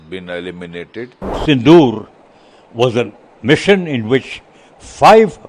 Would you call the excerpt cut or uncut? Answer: cut